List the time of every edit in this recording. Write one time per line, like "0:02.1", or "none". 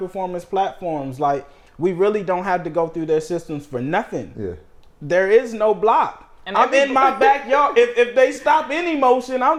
none